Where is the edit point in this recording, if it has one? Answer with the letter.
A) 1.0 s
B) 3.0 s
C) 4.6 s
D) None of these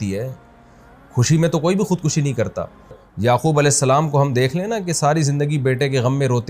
B